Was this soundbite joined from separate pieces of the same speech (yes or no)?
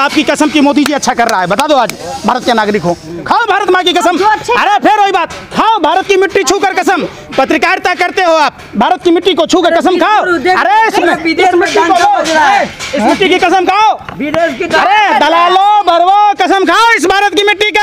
no